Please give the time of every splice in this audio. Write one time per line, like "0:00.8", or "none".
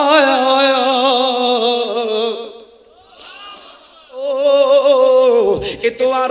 0:04.3